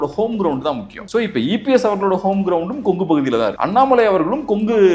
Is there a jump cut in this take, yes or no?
yes